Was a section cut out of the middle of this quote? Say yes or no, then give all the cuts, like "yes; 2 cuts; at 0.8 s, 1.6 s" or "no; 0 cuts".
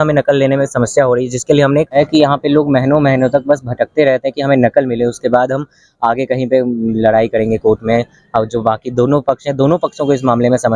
yes; 1 cut; at 2.0 s